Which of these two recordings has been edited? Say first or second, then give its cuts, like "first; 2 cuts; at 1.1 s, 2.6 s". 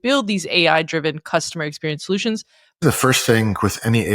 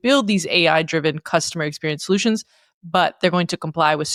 first; 1 cut; at 2.8 s